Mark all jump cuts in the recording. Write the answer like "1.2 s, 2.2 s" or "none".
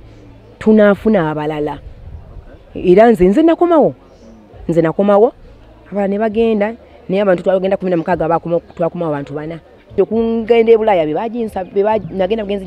10.0 s